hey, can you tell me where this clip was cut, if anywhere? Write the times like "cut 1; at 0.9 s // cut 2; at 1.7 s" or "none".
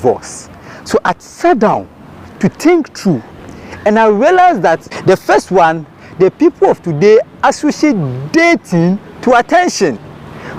cut 1; at 4.9 s